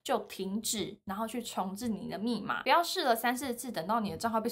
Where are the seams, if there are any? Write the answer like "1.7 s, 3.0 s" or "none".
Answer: 2.6 s